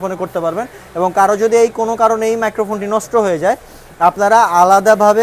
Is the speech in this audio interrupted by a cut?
no; 0 cuts

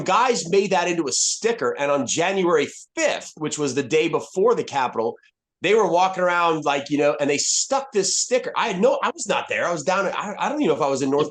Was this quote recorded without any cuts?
yes; 0 cuts

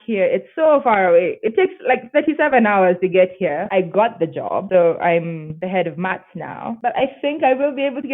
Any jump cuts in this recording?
yes; 4 cuts; at 3.7 s, 4.6 s, 5.5 s, 6.8 s

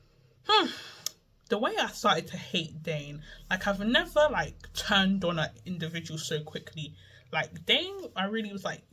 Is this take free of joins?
yes; 0 cuts

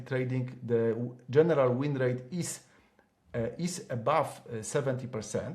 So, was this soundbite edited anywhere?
no; 0 cuts

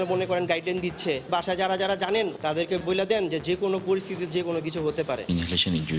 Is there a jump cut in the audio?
yes; 3 cuts; at 1.3 s, 2.8 s, 5.2 s

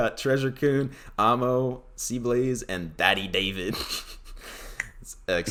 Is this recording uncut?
yes; 0 cuts

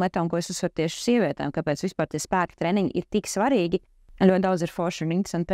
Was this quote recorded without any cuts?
no; 1 cut; at 4.0 s

